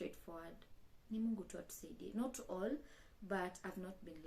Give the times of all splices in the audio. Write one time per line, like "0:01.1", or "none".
none